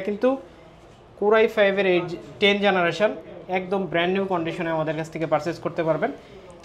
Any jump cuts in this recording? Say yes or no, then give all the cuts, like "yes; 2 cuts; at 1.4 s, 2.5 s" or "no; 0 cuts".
no; 0 cuts